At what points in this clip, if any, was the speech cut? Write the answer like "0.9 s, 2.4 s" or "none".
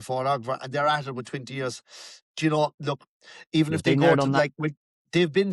none